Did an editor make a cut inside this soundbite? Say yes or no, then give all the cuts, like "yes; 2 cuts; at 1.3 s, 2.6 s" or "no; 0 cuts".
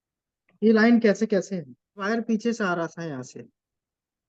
yes; 1 cut; at 2.1 s